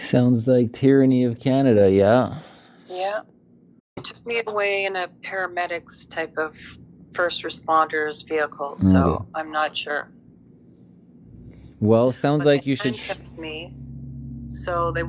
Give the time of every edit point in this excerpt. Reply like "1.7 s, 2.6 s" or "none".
4.1 s